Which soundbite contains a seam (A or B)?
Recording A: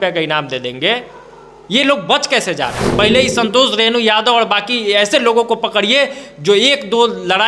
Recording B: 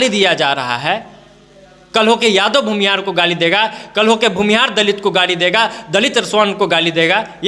A